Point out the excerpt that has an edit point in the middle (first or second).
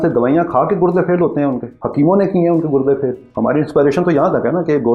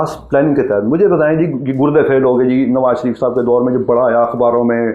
first